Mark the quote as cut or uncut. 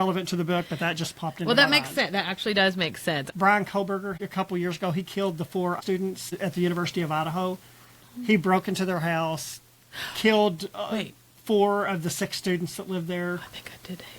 cut